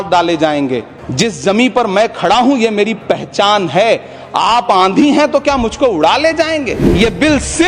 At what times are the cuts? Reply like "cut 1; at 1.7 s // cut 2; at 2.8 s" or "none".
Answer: cut 1; at 1.0 s // cut 2; at 6.8 s